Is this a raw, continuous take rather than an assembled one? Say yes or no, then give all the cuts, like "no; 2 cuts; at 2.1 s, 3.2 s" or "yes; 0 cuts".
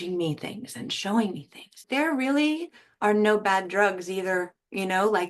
no; 1 cut; at 1.9 s